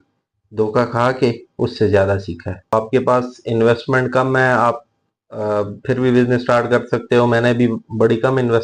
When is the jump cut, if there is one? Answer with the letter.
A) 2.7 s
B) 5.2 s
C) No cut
A